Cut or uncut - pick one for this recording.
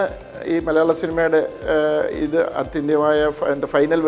uncut